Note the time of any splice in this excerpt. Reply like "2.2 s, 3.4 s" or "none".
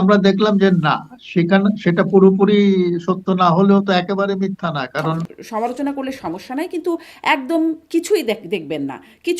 5.3 s